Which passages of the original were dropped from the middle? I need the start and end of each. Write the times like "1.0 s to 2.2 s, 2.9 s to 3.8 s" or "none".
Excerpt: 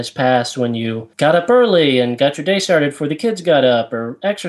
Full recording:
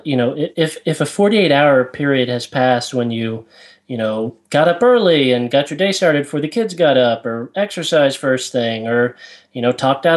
3.4 s to 4.4 s